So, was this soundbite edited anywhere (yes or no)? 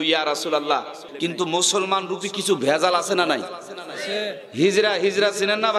yes